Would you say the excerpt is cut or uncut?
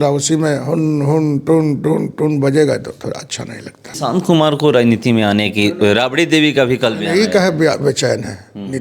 cut